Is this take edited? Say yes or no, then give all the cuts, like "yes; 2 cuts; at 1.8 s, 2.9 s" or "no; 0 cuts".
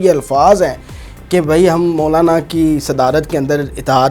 no; 0 cuts